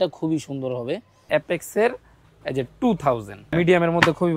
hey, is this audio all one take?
no; 2 cuts; at 1.2 s, 3.5 s

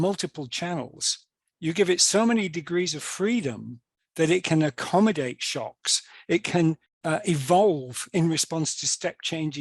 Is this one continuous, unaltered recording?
no; 1 cut; at 6.9 s

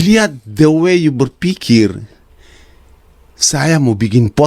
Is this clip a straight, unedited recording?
yes; 0 cuts

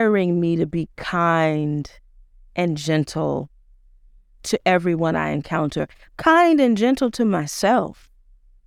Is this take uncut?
yes; 0 cuts

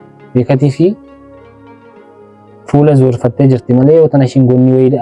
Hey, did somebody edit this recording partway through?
yes; 2 cuts; at 1.0 s, 2.7 s

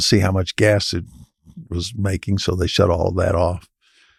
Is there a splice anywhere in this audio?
no; 0 cuts

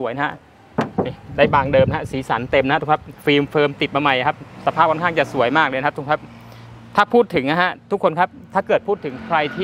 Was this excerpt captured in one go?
yes; 0 cuts

